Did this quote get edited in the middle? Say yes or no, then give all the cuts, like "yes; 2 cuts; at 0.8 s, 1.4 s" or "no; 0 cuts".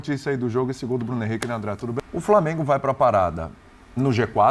yes; 1 cut; at 2.0 s